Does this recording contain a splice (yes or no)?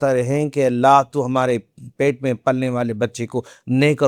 no